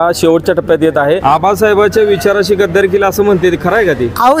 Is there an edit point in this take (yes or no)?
yes